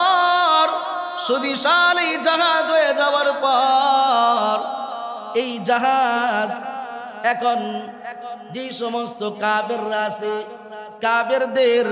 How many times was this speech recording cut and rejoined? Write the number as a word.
zero